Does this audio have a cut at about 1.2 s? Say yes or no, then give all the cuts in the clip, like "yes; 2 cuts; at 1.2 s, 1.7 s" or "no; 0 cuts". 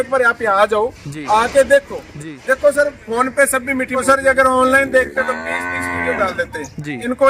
no; 1 cut; at 4.0 s